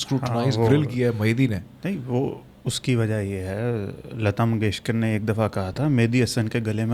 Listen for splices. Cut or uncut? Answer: uncut